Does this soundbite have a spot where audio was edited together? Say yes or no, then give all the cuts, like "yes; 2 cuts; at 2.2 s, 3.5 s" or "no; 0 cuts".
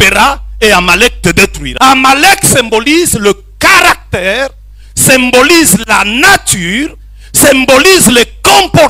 yes; 1 cut; at 1.6 s